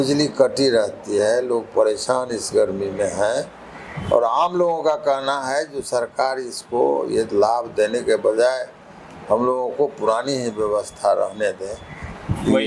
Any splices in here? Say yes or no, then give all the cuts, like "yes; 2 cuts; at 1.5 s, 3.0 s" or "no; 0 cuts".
no; 0 cuts